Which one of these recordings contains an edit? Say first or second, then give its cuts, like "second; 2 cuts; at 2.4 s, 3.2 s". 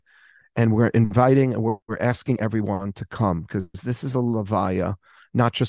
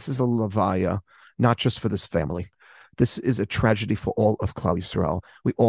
first; 1 cut; at 1.9 s